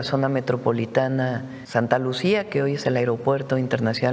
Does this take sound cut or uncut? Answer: cut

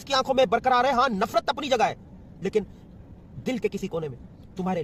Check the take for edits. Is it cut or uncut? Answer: uncut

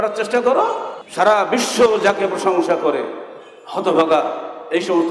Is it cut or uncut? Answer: cut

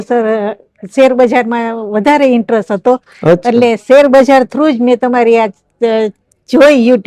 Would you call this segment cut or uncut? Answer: uncut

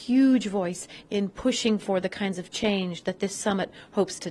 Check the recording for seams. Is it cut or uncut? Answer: uncut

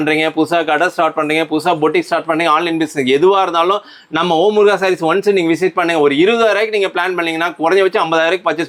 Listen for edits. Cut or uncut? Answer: uncut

